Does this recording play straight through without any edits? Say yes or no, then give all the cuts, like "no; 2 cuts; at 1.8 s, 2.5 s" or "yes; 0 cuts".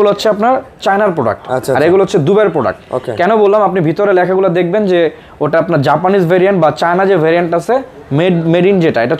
yes; 0 cuts